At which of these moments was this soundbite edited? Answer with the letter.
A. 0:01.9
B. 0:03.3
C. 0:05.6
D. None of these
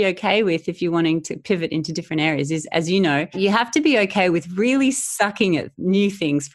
B